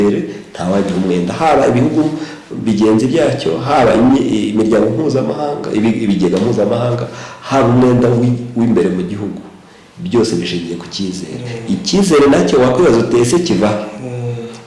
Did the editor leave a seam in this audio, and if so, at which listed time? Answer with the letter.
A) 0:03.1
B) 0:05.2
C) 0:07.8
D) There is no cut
D